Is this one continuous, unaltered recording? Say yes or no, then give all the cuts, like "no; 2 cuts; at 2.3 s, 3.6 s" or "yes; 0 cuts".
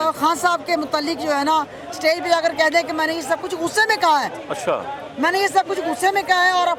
yes; 0 cuts